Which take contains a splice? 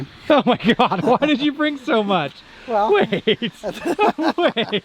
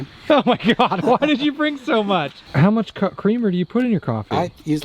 second; 1 cut; at 2.4 s

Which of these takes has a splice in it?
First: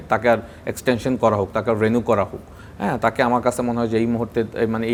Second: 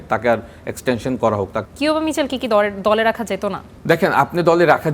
second; 2 cuts; at 1.6 s, 3.7 s

